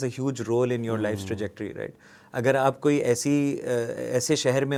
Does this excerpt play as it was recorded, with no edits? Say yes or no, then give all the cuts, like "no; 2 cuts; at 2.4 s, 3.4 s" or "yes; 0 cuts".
yes; 0 cuts